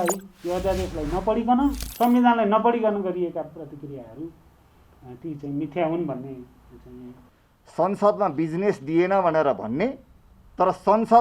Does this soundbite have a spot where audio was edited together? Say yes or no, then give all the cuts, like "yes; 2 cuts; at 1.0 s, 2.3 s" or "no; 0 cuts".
yes; 1 cut; at 7.3 s